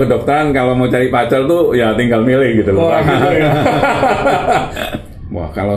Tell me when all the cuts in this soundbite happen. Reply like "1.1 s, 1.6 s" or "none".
4.8 s